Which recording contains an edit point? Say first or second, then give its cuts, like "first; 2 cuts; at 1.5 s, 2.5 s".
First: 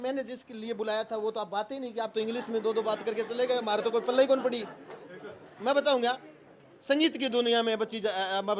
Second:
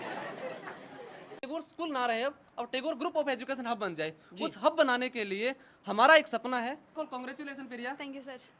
second; 2 cuts; at 1.4 s, 7.0 s